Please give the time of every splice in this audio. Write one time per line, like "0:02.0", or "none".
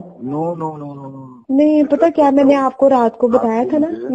0:01.3

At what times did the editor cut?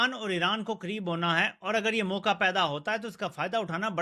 none

